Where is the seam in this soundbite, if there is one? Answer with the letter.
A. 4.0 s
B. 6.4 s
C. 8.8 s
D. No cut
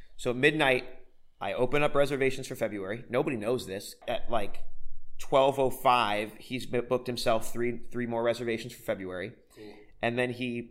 A